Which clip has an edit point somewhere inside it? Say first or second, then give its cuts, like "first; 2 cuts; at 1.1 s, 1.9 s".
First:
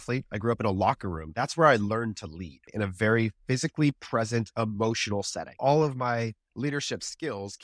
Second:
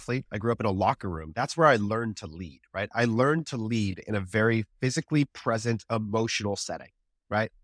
first; 2 cuts; at 2.7 s, 5.6 s